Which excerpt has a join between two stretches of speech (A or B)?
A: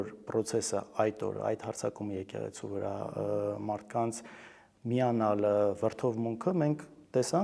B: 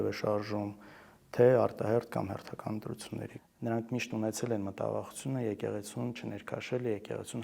B